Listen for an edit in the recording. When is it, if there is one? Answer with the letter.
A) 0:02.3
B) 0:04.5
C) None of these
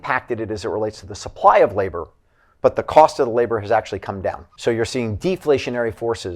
B